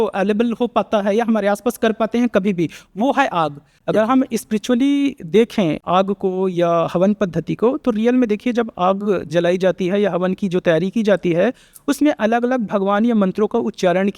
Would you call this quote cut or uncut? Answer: cut